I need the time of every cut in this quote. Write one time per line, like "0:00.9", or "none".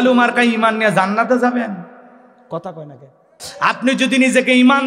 0:03.4

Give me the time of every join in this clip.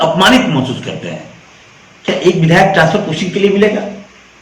none

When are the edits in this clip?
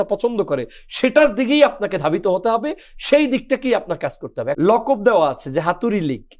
0:04.5

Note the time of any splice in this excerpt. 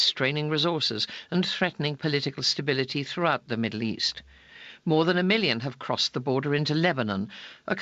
0:01.2

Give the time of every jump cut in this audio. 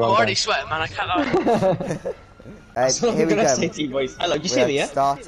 0:02.6

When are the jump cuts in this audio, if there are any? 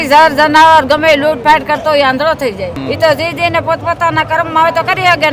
0:02.8

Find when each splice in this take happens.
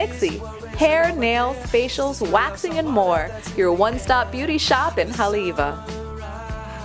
0:05.8

